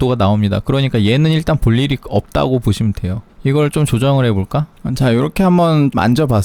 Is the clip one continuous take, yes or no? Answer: yes